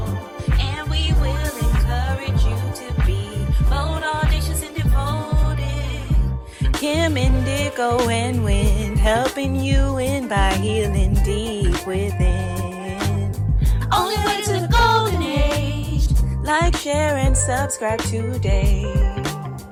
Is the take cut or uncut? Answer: uncut